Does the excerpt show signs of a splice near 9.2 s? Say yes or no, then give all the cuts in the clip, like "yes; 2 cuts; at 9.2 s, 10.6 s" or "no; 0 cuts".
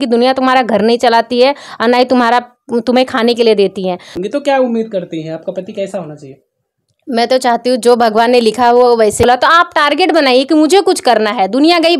yes; 2 cuts; at 4.1 s, 9.2 s